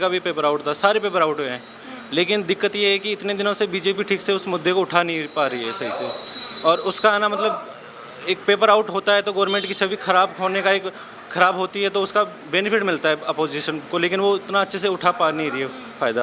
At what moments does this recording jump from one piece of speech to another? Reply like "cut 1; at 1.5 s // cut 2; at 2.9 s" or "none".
none